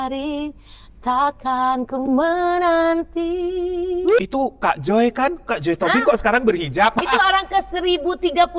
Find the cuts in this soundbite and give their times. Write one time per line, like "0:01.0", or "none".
0:04.2
0:07.0